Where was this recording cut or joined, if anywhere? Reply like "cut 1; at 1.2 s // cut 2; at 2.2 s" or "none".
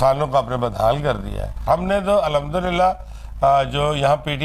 cut 1; at 1.7 s